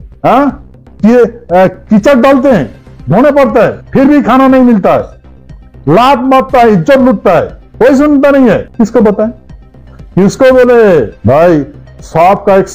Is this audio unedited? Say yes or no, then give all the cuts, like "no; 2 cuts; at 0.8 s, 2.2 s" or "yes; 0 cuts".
no; 4 cuts; at 3.8 s, 7.6 s, 8.7 s, 11.1 s